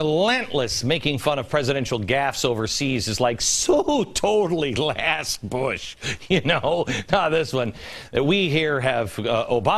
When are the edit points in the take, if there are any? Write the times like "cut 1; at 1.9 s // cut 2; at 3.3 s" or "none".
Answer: cut 1; at 6.0 s